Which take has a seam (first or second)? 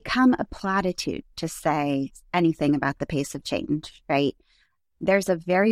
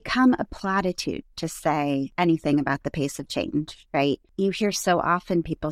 second